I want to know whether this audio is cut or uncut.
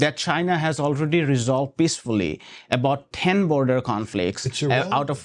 uncut